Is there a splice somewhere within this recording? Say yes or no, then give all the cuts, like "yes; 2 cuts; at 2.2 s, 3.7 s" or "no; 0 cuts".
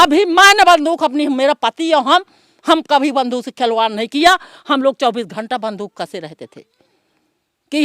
no; 0 cuts